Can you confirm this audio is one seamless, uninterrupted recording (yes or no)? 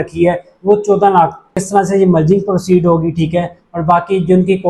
no